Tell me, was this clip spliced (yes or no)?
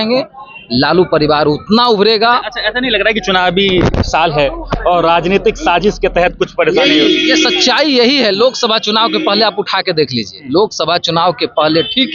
no